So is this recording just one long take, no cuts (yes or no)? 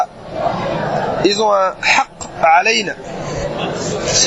yes